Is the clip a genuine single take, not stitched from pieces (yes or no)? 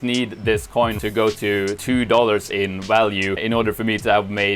no